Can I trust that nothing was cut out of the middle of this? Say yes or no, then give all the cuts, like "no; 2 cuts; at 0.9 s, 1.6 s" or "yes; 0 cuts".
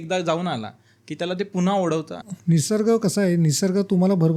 yes; 0 cuts